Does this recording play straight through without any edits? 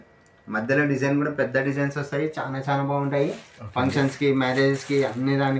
yes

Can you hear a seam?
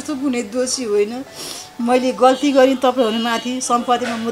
no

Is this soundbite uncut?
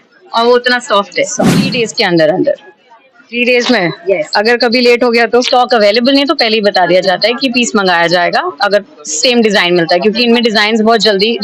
no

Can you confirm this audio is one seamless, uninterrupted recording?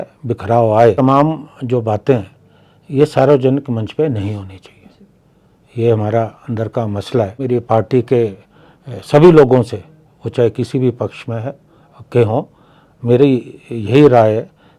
no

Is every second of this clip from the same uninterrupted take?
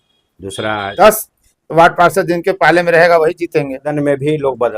no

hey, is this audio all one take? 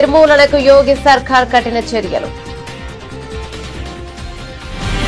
yes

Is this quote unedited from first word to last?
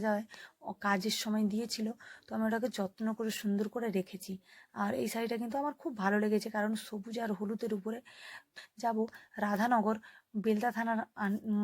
no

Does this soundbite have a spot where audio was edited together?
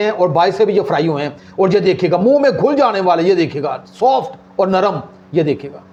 no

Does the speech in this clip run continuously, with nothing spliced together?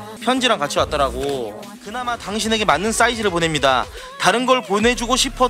no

